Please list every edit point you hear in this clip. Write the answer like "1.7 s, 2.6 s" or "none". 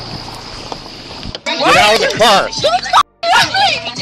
1.4 s